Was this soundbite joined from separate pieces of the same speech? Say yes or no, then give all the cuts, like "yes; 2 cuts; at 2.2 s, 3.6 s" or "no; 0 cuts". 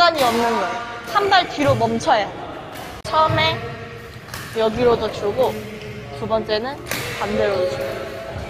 yes; 1 cut; at 3.0 s